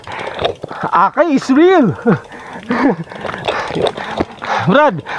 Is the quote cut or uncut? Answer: uncut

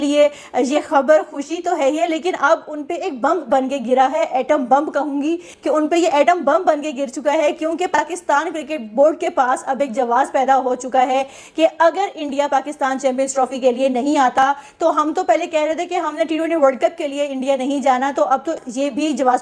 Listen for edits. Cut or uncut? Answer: uncut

